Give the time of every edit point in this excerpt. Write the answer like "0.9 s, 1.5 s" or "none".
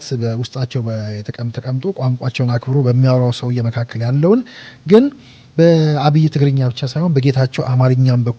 none